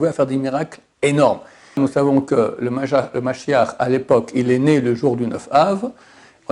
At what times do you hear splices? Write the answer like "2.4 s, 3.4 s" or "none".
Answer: 1.8 s